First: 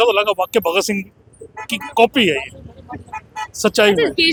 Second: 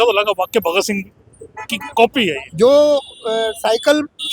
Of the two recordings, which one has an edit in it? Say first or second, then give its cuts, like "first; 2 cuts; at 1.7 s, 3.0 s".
second; 1 cut; at 2.4 s